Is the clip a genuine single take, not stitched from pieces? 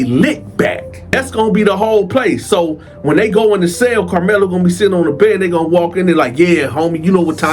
no; 1 cut; at 1.2 s

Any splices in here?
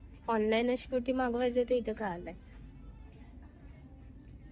no; 0 cuts

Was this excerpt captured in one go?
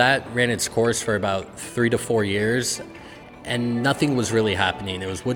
yes; 0 cuts

